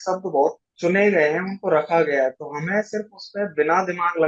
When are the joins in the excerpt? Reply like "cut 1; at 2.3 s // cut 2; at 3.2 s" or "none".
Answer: none